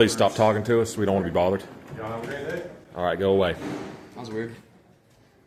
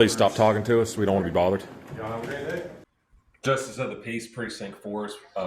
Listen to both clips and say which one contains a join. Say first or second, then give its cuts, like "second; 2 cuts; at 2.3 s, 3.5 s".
second; 1 cut; at 2.8 s